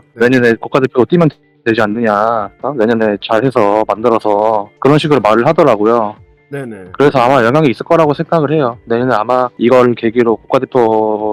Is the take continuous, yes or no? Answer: yes